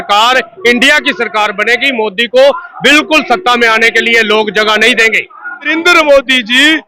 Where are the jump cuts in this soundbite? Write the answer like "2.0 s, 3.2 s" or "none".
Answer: 5.7 s

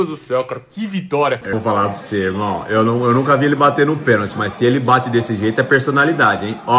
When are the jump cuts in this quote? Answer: 1.5 s

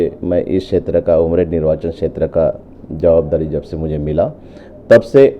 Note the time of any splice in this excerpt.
none

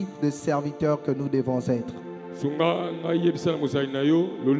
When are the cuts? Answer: none

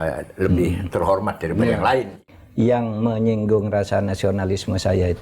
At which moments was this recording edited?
2.2 s

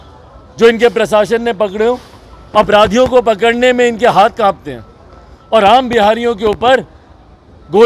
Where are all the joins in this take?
none

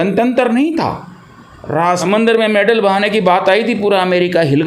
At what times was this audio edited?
2.0 s

